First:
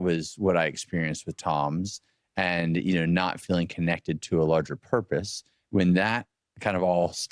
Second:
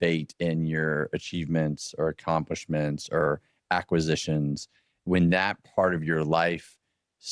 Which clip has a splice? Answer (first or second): first